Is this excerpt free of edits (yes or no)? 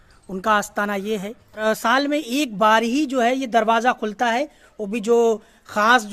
no